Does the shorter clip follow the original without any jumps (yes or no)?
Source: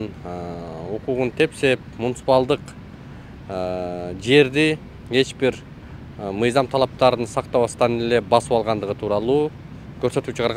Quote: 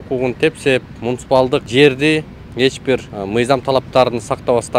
no